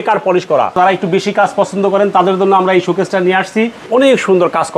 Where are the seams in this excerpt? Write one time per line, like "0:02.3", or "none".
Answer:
0:00.7
0:03.8